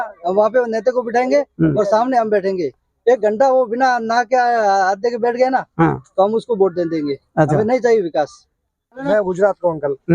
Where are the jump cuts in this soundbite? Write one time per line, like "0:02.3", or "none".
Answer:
0:09.0

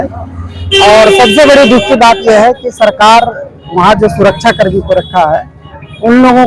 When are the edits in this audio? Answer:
none

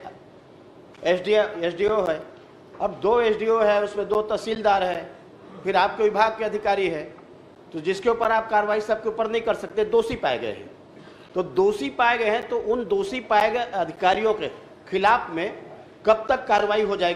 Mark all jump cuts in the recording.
none

